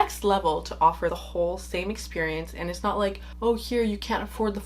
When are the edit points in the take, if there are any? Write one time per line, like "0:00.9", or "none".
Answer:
0:01.1
0:03.3

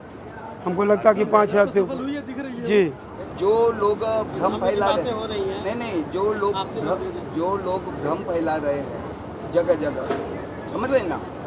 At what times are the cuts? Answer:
0:03.1

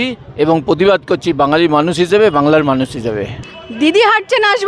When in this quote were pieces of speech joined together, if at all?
0:03.4

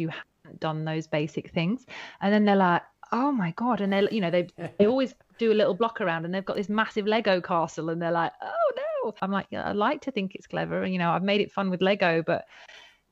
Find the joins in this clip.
0:09.2

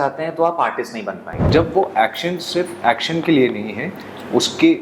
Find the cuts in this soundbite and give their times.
0:01.5

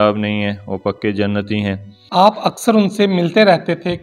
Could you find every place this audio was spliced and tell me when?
0:01.9

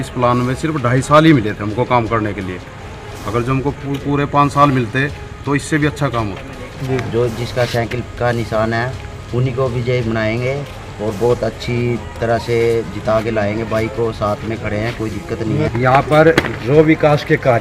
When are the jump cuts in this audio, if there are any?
0:06.8
0:15.7

